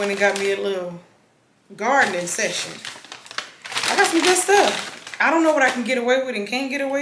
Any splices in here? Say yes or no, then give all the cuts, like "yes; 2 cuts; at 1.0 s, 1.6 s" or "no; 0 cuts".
no; 0 cuts